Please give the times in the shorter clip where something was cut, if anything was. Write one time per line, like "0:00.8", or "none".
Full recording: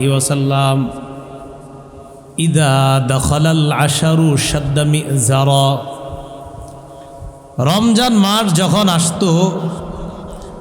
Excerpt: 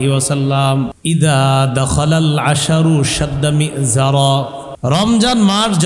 0:01.0
0:04.6